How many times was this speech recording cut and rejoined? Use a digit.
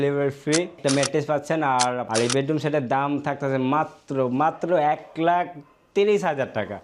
2